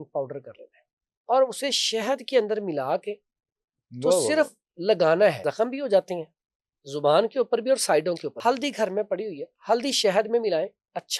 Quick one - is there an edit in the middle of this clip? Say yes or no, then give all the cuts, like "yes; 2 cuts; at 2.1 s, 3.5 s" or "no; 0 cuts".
yes; 2 cuts; at 5.5 s, 8.3 s